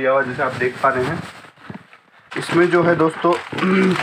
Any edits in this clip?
yes; 1 cut; at 2.2 s

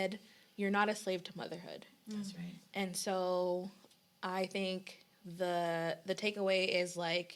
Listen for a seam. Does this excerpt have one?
no; 0 cuts

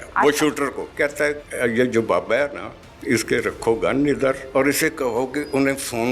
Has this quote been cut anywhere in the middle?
yes; 2 cuts; at 1.2 s, 4.4 s

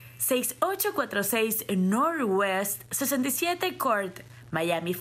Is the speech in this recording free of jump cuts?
yes; 0 cuts

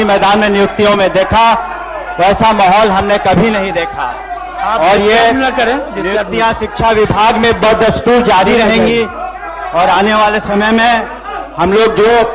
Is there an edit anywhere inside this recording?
no; 0 cuts

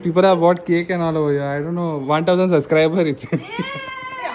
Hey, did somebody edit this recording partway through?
no; 0 cuts

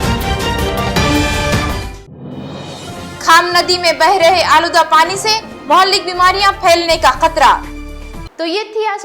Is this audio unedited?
yes; 0 cuts

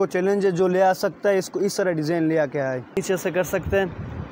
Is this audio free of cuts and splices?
no; 1 cut; at 3.0 s

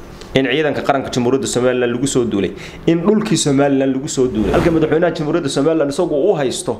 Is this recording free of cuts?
no; 1 cut; at 4.5 s

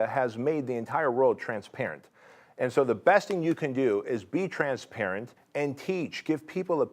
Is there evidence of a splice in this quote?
yes; 1 cut; at 5.4 s

